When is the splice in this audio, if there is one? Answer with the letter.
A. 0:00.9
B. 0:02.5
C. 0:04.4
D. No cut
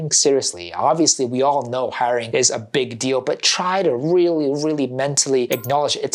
D